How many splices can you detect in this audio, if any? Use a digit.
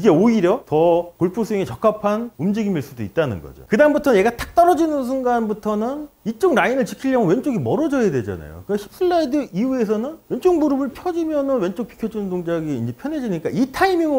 1